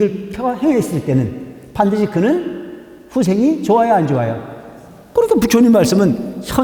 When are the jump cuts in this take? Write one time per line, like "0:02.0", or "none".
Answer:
none